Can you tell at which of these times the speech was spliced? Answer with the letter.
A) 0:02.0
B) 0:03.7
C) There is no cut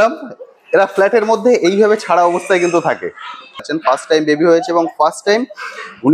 B